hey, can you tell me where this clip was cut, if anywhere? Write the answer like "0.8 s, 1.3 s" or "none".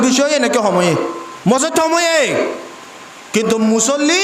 1.2 s